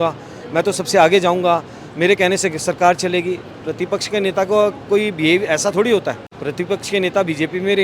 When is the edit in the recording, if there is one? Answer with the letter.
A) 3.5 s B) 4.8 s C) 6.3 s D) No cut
C